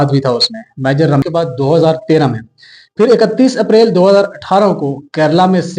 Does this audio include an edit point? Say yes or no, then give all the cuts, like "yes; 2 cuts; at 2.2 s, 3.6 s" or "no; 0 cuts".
yes; 1 cut; at 1.2 s